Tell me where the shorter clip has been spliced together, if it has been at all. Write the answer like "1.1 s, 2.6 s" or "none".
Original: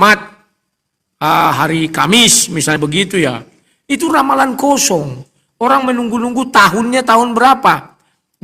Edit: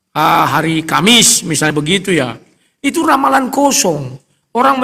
none